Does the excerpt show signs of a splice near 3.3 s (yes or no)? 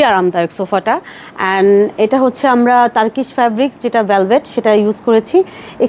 no